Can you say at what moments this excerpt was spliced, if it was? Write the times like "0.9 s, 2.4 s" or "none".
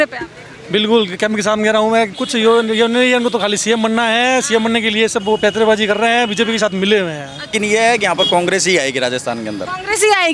2.1 s, 7.5 s